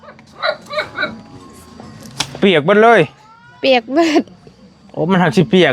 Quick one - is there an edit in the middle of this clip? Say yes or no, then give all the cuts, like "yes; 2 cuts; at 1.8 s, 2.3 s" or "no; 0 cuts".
no; 0 cuts